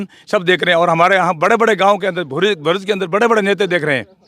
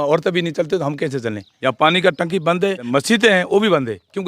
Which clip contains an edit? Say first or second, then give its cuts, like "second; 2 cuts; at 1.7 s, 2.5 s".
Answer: second; 2 cuts; at 1.4 s, 2.9 s